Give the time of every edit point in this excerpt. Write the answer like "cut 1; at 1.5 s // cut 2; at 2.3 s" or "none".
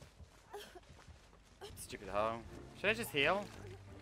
cut 1; at 1.8 s